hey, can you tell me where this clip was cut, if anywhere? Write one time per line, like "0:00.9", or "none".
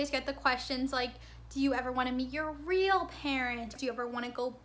0:03.7